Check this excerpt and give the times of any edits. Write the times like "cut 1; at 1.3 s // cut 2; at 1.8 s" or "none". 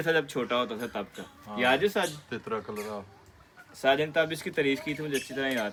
none